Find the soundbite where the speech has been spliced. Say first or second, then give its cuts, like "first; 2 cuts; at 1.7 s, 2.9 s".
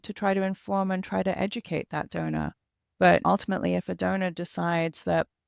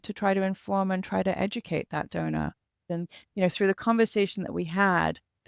second; 1 cut; at 3.0 s